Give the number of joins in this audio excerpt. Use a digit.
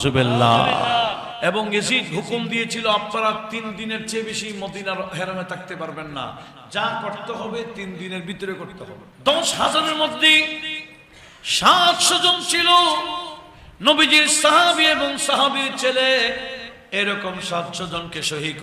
2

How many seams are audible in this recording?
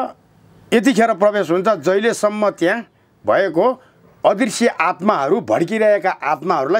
0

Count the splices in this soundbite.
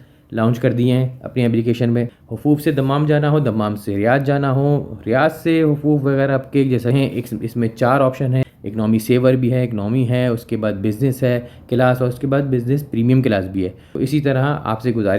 3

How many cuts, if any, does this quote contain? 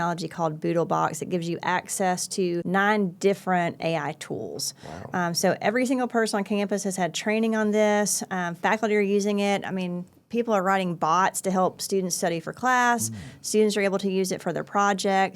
1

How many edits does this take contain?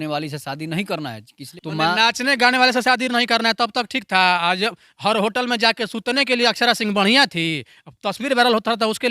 1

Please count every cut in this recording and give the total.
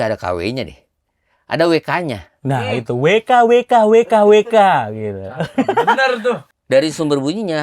1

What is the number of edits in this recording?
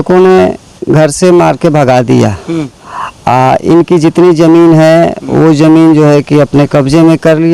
0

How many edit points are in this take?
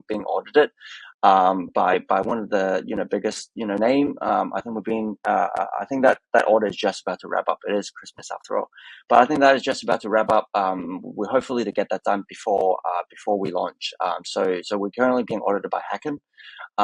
0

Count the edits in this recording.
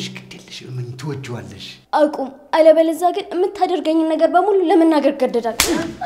0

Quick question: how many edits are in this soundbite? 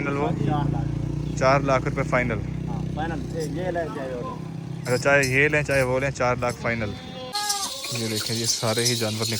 1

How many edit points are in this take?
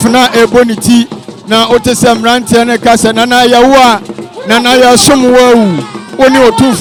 0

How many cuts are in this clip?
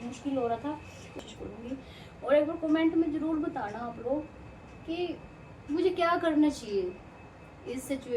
1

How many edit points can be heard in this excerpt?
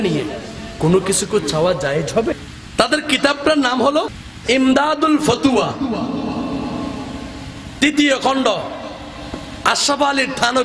2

